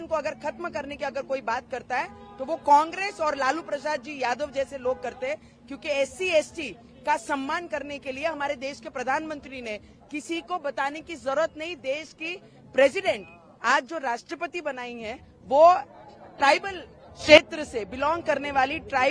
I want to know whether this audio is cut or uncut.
uncut